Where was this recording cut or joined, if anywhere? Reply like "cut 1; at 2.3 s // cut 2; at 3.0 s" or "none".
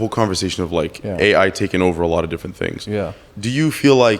cut 1; at 3.2 s